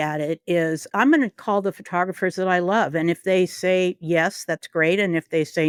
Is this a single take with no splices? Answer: yes; 0 cuts

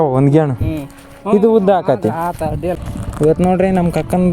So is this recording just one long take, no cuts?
no; 1 cut; at 2.8 s

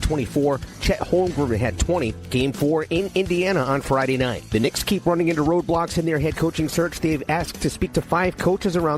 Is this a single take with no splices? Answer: no; 1 cut; at 4.4 s

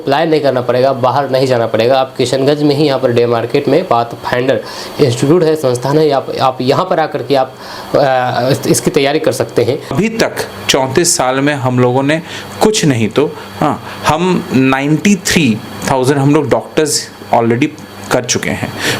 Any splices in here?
yes; 1 cut; at 10.0 s

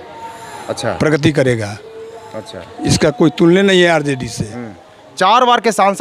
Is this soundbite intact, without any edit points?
yes; 0 cuts

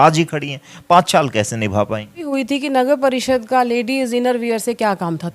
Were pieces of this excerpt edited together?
yes; 1 cut; at 2.3 s

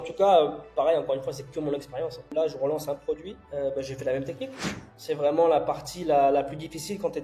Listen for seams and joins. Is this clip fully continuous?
no; 3 cuts; at 2.3 s, 3.3 s, 4.9 s

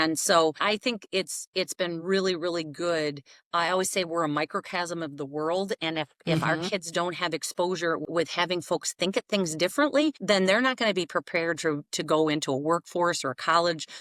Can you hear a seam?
no; 0 cuts

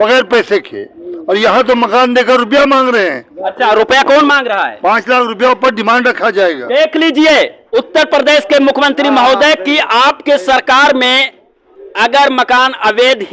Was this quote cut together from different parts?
no; 0 cuts

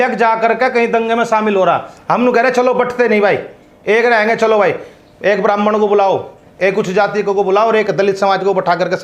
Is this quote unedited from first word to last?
no; 1 cut; at 1.9 s

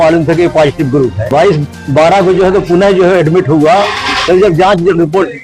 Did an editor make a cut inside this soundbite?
yes; 1 cut; at 1.2 s

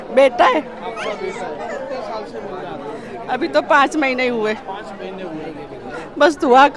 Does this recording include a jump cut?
no; 0 cuts

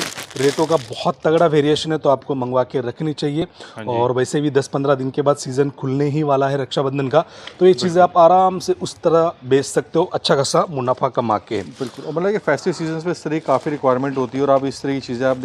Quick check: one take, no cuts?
yes; 0 cuts

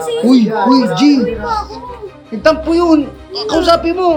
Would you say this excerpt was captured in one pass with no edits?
yes; 0 cuts

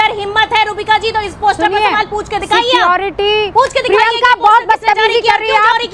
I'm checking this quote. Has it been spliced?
no; 0 cuts

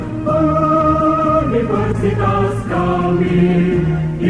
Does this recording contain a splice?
no; 0 cuts

